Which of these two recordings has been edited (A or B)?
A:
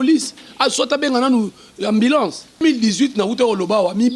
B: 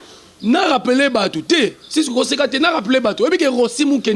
A